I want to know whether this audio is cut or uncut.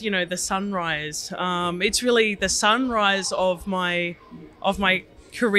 uncut